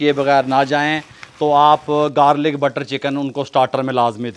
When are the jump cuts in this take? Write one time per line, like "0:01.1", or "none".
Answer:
none